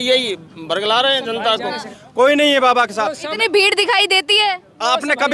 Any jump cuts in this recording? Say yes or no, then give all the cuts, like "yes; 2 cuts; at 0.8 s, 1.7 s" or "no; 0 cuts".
yes; 1 cut; at 1.9 s